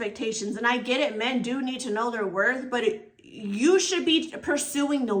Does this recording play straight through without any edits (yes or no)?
yes